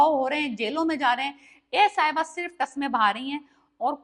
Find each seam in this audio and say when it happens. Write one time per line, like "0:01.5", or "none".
none